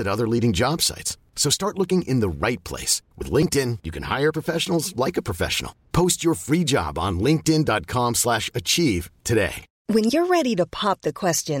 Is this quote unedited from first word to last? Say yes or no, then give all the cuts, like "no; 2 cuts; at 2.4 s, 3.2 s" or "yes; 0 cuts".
no; 1 cut; at 9.7 s